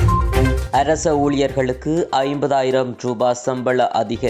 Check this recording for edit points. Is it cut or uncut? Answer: uncut